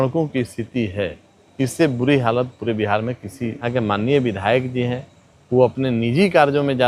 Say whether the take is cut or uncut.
cut